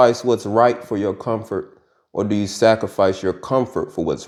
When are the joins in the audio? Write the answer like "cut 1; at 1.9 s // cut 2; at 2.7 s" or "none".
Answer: none